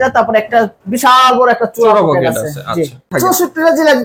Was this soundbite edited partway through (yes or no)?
yes